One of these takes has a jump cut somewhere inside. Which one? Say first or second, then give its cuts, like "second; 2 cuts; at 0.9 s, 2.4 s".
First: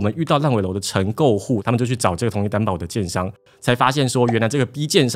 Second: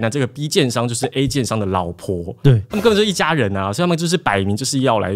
first; 1 cut; at 1.6 s